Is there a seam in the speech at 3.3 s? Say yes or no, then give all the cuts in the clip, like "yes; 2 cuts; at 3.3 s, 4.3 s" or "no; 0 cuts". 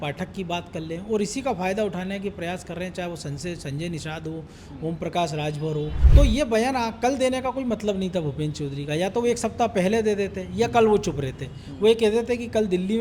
no; 1 cut; at 6.0 s